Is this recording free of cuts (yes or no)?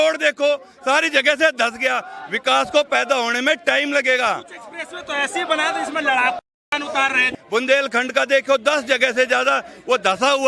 yes